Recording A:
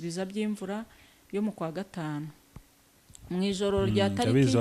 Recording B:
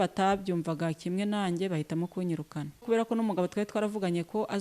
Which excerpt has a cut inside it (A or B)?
B